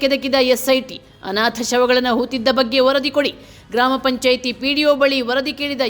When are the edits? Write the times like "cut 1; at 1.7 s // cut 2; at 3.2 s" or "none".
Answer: none